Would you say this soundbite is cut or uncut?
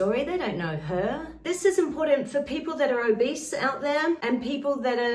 cut